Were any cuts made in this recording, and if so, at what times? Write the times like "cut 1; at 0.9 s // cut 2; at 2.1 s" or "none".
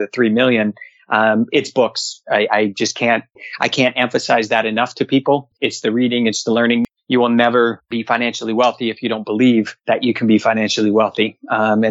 cut 1; at 5.5 s // cut 2; at 6.9 s // cut 3; at 7.9 s // cut 4; at 9.8 s